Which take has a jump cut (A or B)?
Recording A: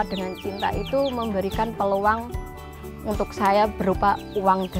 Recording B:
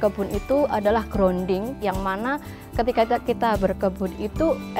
B